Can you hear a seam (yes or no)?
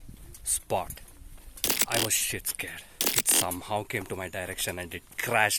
yes